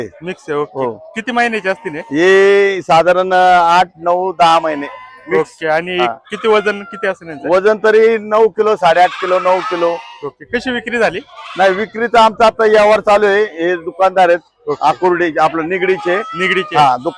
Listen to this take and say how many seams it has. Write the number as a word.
zero